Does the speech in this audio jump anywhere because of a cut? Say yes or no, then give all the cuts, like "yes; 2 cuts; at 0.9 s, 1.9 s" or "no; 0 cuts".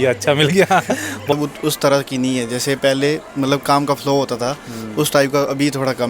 yes; 1 cut; at 1.3 s